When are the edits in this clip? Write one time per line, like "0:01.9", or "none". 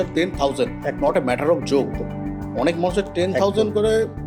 none